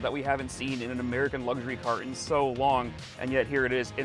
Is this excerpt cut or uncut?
uncut